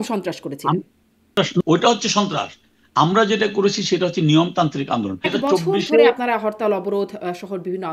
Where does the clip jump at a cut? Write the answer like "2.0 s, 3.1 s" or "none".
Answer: 1.3 s, 5.2 s